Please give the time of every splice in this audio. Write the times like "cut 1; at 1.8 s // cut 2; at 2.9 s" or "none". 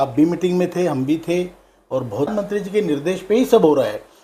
cut 1; at 2.3 s